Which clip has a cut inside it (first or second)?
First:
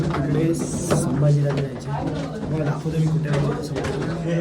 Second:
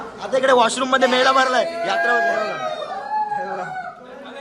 second